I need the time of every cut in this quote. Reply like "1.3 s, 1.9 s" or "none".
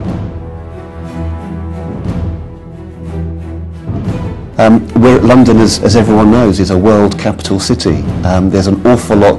1.0 s